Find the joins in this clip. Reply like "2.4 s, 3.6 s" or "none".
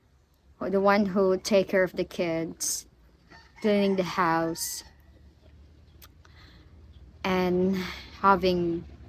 none